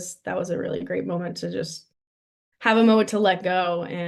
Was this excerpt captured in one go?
yes; 0 cuts

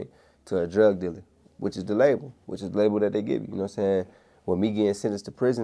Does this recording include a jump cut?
no; 0 cuts

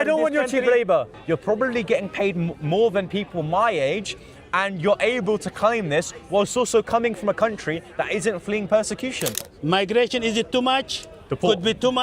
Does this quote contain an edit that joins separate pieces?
yes; 2 cuts; at 1.1 s, 9.5 s

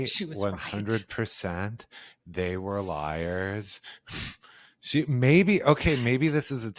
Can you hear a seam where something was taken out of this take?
no; 0 cuts

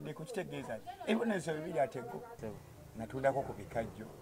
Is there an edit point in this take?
yes; 1 cut; at 2.4 s

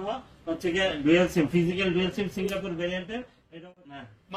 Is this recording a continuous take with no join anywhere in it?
no; 1 cut; at 3.4 s

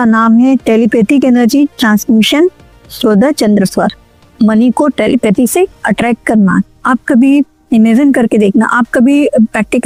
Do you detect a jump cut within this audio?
no; 0 cuts

